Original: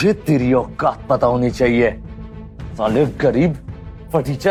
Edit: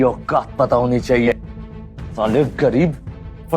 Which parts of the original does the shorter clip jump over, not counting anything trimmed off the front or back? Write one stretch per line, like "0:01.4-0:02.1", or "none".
0:01.8-0:01.9